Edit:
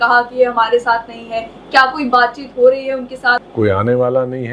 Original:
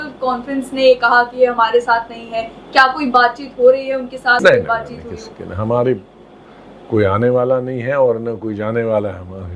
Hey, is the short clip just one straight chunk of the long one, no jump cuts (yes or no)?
no